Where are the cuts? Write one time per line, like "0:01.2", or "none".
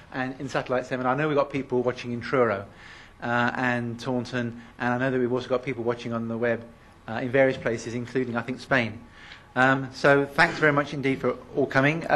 none